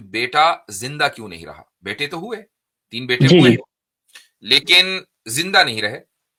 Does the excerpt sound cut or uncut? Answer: uncut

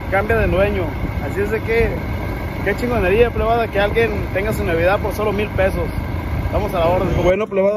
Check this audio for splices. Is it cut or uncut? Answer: uncut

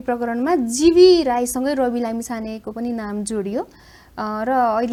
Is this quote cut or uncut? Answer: uncut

